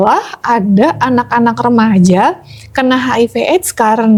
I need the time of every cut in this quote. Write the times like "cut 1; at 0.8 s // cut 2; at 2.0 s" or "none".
none